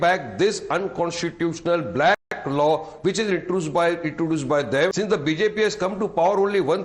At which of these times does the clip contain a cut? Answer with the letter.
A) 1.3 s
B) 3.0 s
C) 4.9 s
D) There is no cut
C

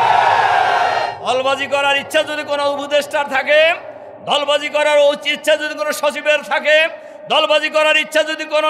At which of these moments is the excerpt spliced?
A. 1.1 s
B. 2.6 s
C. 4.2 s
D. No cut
A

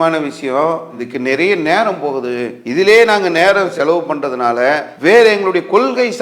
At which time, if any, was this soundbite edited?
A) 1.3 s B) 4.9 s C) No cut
B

